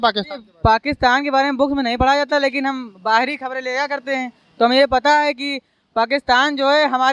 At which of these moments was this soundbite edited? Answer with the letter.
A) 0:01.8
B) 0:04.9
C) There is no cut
C